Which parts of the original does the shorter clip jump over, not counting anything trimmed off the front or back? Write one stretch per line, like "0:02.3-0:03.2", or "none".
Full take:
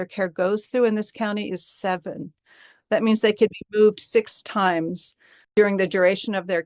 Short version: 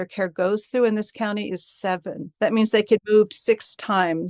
0:02.2-0:02.7
0:03.5-0:03.7